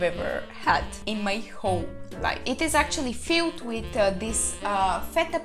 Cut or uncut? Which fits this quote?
uncut